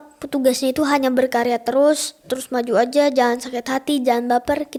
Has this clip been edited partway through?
no; 0 cuts

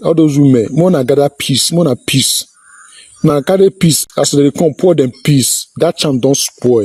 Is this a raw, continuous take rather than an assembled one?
yes; 0 cuts

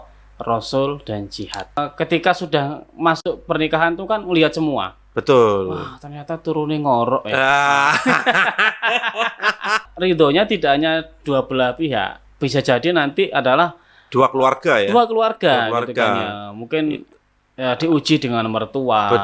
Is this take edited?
yes; 2 cuts; at 1.8 s, 9.9 s

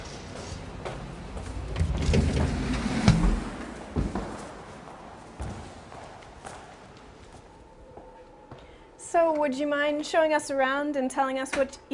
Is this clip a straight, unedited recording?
yes; 0 cuts

